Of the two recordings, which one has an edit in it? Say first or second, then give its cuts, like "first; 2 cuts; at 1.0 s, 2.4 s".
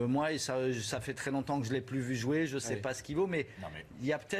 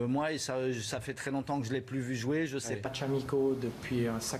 first; 1 cut; at 2.9 s